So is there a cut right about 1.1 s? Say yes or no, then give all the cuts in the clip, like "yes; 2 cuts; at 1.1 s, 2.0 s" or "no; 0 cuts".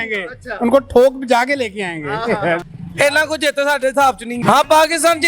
no; 2 cuts; at 2.7 s, 4.3 s